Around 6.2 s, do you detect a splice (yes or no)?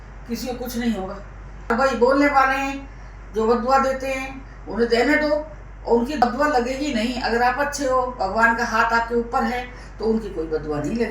yes